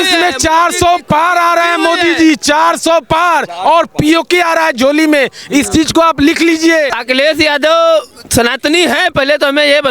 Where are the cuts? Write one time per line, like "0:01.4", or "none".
0:07.0